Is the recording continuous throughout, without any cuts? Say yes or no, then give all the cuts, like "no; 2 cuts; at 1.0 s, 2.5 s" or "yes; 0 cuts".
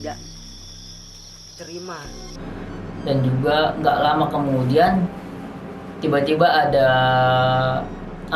no; 1 cut; at 2.3 s